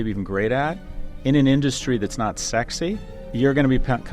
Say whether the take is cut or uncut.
cut